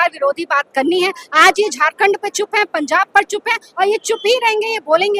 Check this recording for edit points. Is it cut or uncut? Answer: uncut